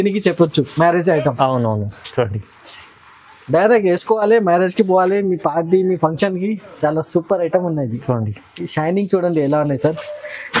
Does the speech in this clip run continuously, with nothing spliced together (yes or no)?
yes